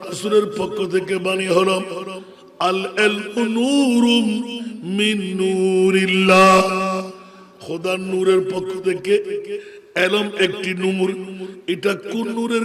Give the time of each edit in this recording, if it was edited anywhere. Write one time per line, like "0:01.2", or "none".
none